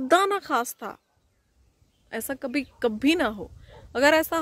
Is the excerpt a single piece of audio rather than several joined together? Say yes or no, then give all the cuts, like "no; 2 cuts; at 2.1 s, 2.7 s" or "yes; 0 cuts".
yes; 0 cuts